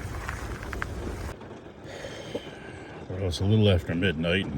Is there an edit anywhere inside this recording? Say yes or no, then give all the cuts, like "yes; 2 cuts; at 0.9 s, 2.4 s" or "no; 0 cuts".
yes; 1 cut; at 1.3 s